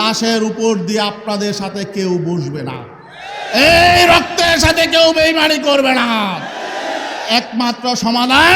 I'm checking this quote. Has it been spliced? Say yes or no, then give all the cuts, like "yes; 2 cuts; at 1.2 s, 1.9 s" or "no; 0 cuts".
no; 0 cuts